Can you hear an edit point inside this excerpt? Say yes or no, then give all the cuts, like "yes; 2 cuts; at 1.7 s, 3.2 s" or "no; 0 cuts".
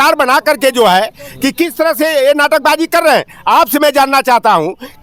no; 0 cuts